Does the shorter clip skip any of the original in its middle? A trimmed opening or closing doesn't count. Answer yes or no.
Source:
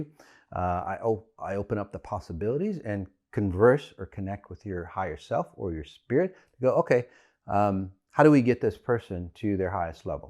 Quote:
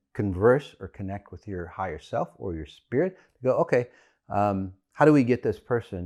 no